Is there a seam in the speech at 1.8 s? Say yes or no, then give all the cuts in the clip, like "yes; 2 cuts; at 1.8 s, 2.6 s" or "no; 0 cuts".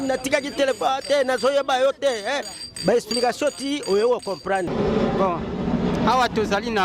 no; 1 cut; at 4.7 s